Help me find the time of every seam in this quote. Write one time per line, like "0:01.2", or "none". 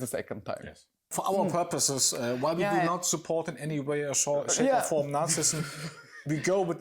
0:01.1